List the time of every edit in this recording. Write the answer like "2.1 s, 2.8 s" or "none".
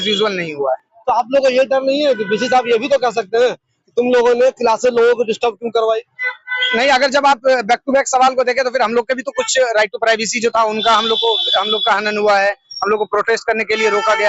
none